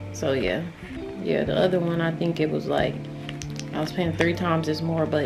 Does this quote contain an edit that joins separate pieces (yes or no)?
no